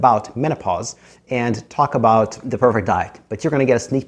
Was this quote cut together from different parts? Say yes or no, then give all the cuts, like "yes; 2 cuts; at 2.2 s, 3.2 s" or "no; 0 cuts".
yes; 1 cut; at 2.4 s